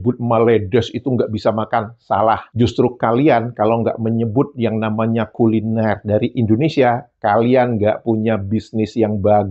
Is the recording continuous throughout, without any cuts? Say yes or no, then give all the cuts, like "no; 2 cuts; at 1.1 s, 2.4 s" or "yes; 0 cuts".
yes; 0 cuts